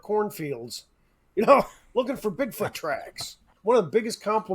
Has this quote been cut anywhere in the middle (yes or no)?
yes